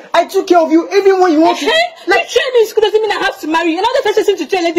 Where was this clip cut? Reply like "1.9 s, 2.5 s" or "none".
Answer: none

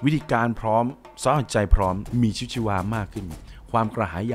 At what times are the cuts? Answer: 2.0 s

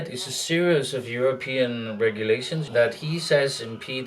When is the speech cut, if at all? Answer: 2.6 s

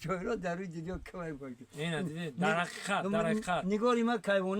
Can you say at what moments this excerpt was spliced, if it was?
none

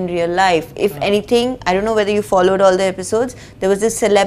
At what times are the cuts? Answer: none

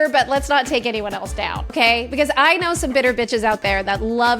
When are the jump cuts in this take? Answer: 1.6 s

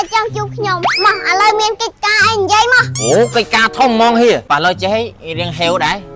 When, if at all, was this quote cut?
0.9 s, 4.4 s

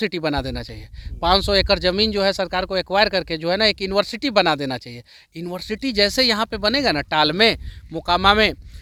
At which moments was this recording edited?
none

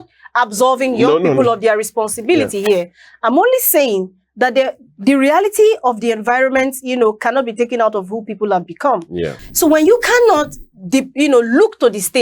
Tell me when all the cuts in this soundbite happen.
9.4 s

